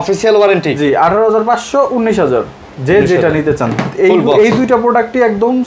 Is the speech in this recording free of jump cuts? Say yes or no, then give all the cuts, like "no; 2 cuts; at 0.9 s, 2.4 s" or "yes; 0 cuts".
yes; 0 cuts